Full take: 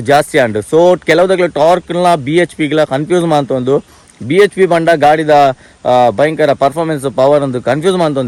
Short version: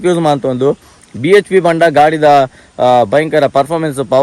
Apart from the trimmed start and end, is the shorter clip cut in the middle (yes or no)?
no